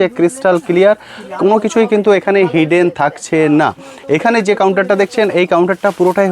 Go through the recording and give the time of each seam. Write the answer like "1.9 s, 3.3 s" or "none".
none